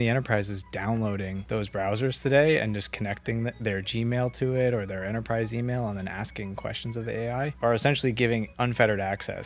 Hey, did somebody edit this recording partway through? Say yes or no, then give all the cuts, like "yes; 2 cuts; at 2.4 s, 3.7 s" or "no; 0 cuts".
no; 0 cuts